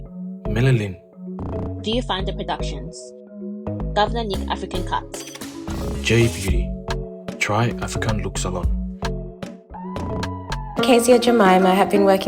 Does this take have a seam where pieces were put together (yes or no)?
no